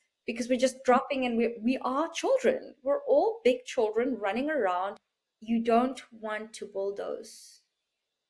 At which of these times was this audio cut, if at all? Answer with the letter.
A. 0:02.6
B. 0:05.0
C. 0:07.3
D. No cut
B